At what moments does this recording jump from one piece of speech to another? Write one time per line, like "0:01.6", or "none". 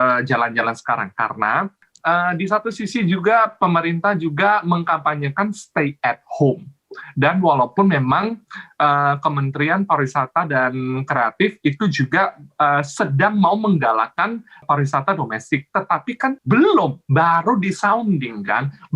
0:01.8
0:14.6
0:16.4